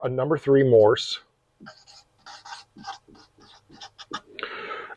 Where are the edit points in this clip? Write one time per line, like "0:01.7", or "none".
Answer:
none